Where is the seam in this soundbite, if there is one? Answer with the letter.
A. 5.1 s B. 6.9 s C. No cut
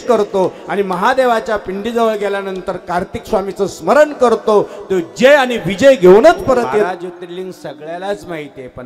B